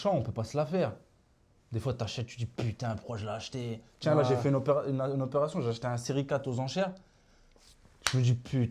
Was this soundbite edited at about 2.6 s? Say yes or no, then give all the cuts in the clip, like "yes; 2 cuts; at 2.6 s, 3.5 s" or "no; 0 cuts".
no; 0 cuts